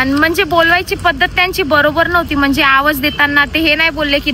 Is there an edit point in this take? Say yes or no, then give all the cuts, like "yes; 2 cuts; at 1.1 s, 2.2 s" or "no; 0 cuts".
no; 0 cuts